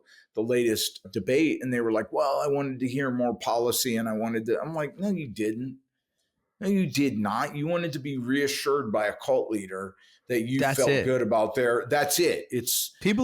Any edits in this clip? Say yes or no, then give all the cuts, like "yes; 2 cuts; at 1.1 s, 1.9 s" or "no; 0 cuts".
yes; 1 cut; at 1.0 s